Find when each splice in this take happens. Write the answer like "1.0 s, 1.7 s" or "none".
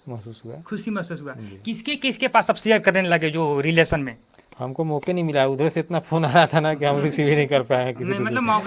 none